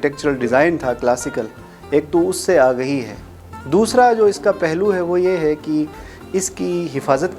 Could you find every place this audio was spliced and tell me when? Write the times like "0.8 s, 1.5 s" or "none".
none